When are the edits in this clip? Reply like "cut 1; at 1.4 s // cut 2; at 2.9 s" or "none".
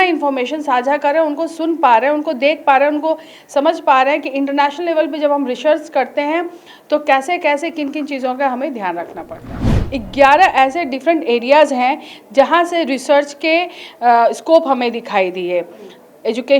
cut 1; at 9.5 s